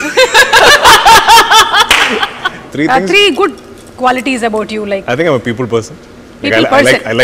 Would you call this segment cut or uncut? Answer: cut